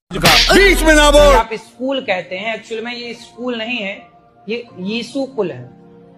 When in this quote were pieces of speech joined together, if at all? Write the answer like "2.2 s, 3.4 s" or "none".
1.4 s